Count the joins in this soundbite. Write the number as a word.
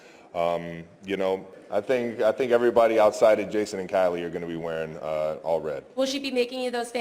one